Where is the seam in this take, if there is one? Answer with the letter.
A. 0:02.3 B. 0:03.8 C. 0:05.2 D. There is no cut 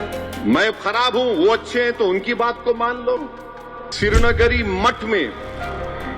B